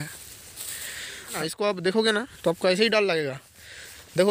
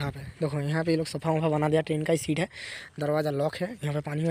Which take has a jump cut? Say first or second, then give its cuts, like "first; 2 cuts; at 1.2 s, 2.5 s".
first; 1 cut; at 1.3 s